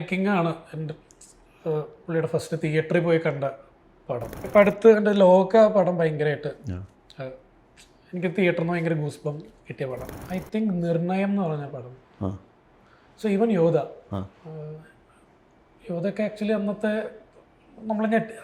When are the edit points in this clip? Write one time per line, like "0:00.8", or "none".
0:04.4
0:10.1

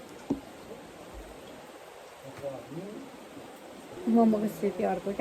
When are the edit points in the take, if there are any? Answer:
0:04.0

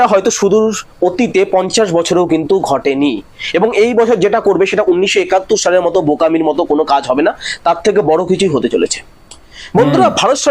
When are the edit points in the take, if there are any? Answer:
none

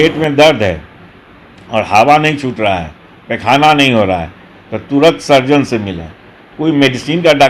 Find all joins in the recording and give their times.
none

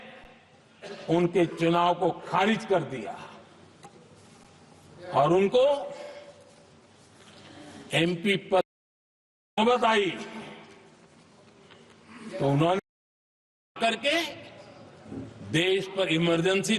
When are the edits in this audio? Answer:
none

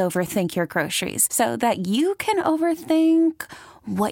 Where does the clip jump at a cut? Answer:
none

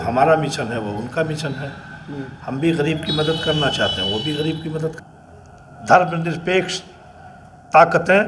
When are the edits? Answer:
0:05.0

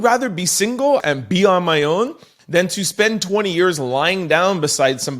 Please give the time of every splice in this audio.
0:01.0

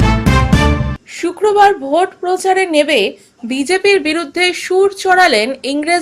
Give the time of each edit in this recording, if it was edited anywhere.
0:01.0

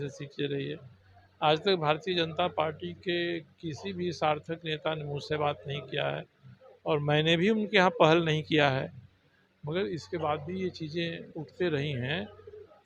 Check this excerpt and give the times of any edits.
none

